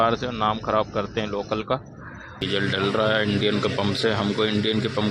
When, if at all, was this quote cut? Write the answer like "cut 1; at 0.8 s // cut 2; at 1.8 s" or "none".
cut 1; at 2.4 s